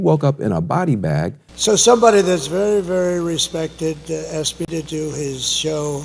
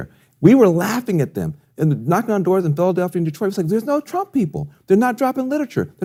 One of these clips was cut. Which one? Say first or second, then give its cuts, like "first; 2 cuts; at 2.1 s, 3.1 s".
first; 1 cut; at 1.4 s